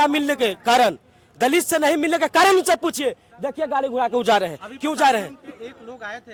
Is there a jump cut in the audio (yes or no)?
no